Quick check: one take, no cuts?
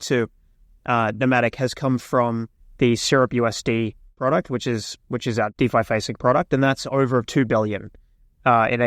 no; 2 cuts; at 4.1 s, 5.5 s

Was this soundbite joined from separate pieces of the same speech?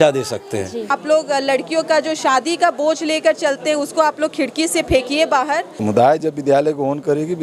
yes; 2 cuts; at 1.0 s, 5.7 s

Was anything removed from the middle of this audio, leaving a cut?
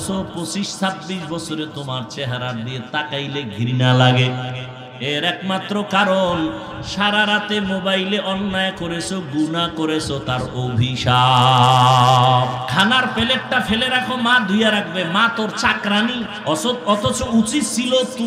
yes; 2 cuts; at 12.6 s, 16.3 s

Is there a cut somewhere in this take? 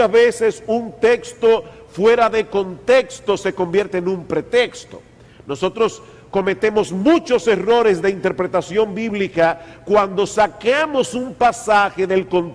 yes; 1 cut; at 6.6 s

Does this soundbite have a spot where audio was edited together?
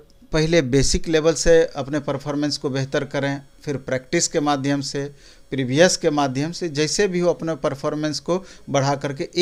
no; 0 cuts

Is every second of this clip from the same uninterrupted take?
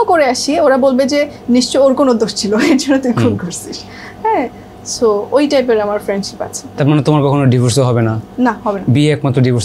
yes; 0 cuts

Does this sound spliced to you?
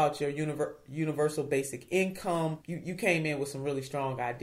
yes; 1 cut; at 2.7 s

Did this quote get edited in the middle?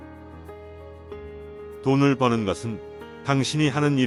no; 0 cuts

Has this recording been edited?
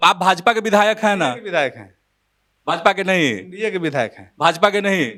no; 0 cuts

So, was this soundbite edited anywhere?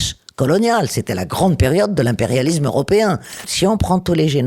yes; 1 cut; at 3.4 s

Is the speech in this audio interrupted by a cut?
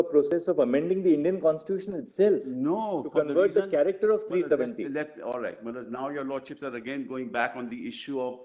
no; 0 cuts

